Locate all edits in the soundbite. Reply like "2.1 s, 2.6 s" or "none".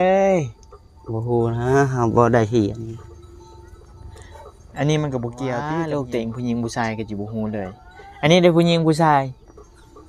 5.7 s

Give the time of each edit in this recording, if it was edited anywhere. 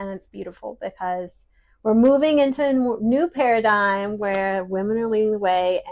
none

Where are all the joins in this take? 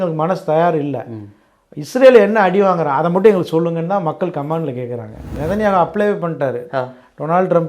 5.3 s

